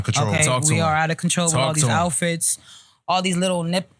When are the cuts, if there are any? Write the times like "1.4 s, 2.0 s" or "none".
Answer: none